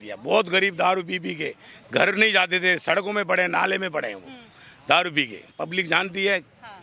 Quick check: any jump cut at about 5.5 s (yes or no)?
yes